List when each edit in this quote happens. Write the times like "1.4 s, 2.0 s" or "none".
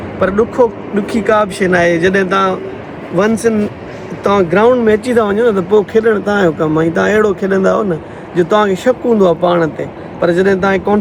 none